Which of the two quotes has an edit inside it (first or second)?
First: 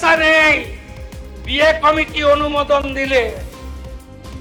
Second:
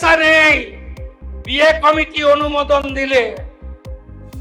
second